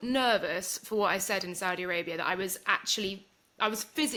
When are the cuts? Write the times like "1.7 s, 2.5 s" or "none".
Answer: none

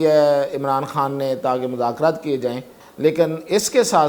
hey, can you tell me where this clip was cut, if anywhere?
2.8 s

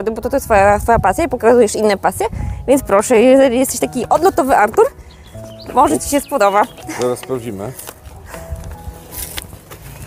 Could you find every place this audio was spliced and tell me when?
none

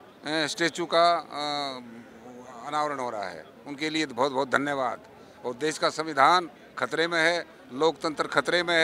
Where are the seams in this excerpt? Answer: none

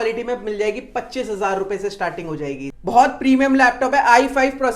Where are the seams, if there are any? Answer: 2.7 s

